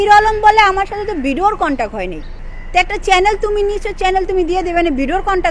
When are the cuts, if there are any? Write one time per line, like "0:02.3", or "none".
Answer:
none